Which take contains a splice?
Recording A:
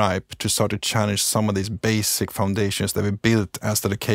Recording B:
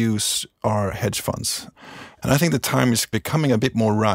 B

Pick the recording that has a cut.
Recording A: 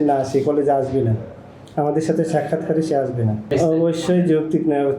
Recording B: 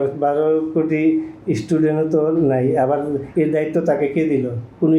A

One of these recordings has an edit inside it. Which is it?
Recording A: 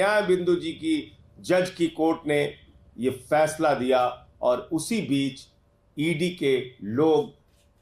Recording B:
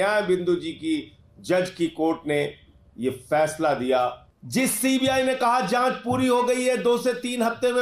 B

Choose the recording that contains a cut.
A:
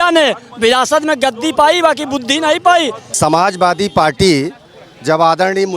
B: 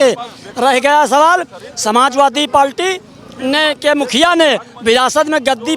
A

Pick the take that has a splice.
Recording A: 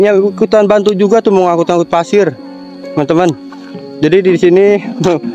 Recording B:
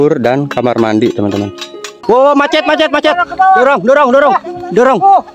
B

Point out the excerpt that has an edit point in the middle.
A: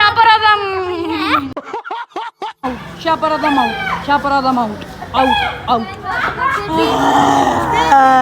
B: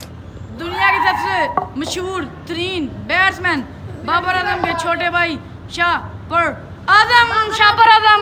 A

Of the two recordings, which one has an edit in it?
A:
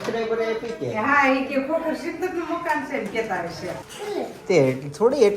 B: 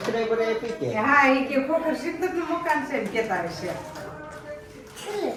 A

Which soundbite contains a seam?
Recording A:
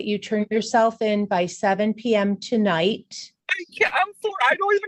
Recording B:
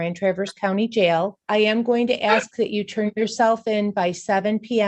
B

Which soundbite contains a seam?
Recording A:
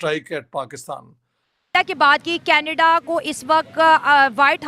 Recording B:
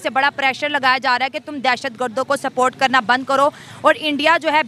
A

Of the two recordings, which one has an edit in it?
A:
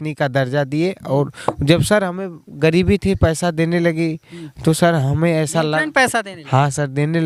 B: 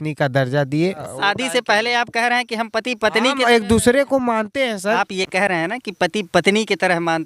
B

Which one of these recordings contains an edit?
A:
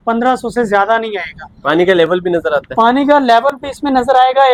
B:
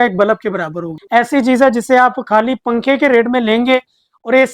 B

